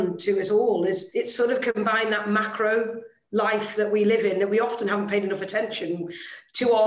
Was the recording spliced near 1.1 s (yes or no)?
yes